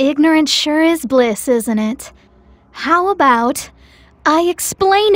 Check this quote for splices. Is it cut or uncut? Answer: uncut